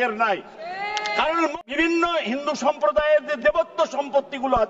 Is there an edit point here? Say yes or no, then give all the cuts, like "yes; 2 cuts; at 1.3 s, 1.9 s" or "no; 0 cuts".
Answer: yes; 1 cut; at 1.7 s